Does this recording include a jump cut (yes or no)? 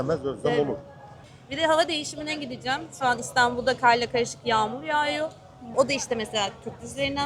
yes